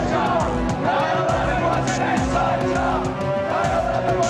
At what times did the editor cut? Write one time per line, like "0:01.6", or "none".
none